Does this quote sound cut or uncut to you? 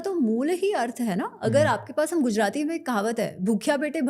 uncut